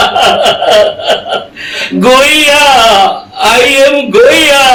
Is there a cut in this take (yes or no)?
no